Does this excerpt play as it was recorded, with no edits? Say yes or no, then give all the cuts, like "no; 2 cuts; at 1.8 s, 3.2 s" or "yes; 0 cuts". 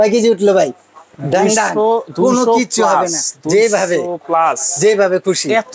yes; 0 cuts